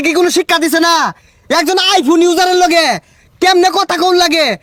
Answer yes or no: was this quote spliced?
no